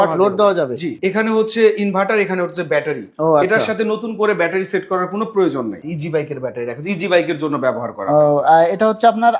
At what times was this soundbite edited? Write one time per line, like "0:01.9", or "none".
0:00.9
0:05.9